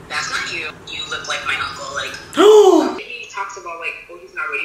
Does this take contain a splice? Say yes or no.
yes